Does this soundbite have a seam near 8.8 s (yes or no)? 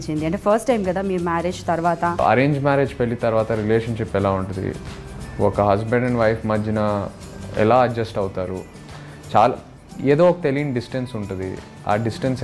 no